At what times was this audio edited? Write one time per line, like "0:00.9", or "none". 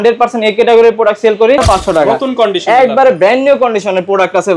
0:01.6